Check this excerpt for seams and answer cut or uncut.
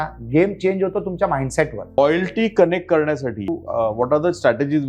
cut